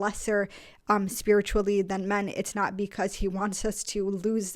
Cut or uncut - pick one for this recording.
uncut